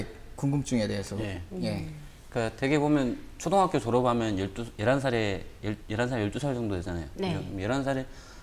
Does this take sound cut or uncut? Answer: uncut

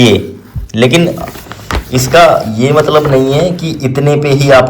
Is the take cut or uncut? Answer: uncut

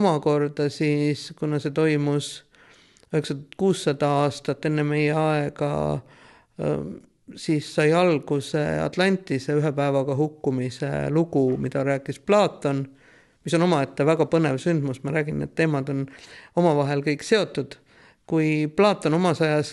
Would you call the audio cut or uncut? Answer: uncut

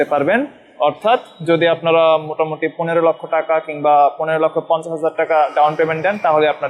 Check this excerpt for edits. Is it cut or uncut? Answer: uncut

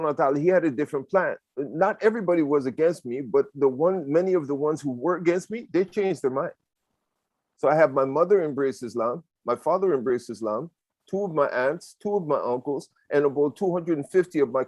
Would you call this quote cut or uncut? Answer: cut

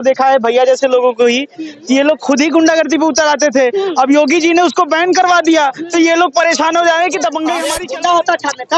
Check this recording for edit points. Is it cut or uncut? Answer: cut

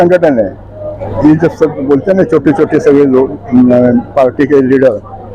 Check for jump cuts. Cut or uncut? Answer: cut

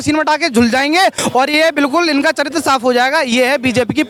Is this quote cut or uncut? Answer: uncut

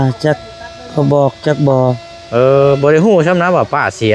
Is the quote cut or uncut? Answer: uncut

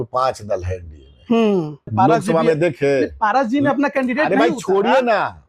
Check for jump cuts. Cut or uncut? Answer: cut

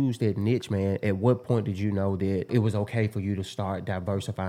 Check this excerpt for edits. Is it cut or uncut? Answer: cut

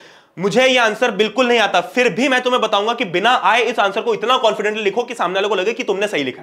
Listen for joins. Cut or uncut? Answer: uncut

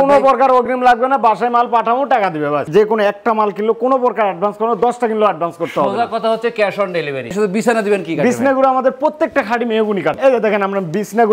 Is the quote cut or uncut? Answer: cut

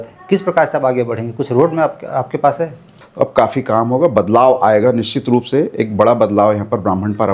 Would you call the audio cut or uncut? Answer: cut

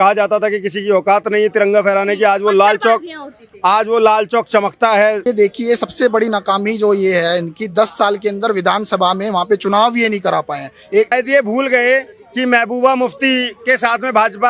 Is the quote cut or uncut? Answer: cut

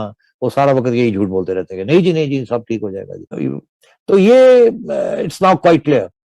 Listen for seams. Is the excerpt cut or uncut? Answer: uncut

